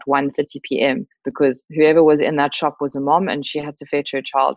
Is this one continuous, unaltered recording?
yes; 0 cuts

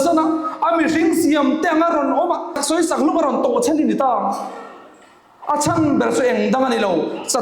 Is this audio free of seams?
yes; 0 cuts

